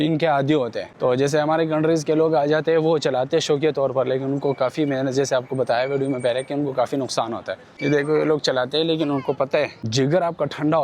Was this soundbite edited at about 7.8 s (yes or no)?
no